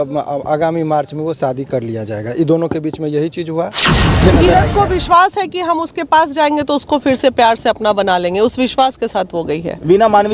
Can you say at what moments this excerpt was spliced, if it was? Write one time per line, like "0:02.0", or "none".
0:04.2